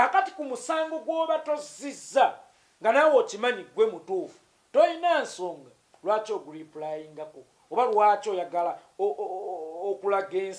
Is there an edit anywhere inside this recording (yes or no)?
no